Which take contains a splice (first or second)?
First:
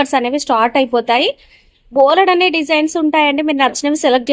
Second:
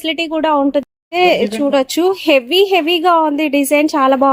second